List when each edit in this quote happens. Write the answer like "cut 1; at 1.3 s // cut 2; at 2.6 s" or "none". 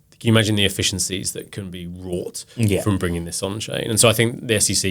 none